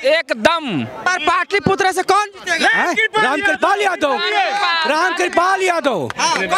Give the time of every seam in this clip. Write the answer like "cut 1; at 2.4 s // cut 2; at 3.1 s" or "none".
cut 1; at 1.0 s